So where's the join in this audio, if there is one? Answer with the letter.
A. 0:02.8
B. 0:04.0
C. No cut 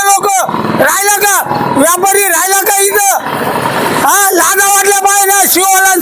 C